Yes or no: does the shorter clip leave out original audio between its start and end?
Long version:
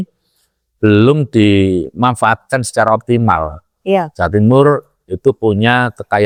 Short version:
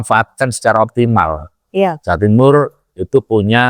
no